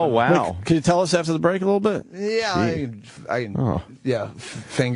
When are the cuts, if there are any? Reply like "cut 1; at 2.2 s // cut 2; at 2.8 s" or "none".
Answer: cut 1; at 3.0 s